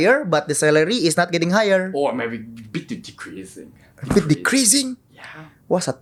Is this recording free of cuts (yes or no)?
yes